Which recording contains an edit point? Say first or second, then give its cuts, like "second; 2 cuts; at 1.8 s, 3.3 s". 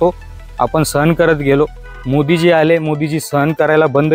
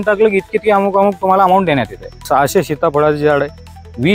second; 1 cut; at 2.3 s